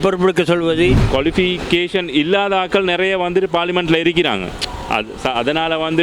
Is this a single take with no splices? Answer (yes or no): no